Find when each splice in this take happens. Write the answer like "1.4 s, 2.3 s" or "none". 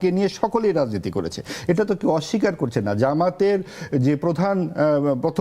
none